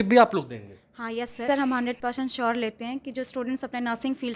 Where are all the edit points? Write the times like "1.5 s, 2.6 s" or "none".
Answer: 1.4 s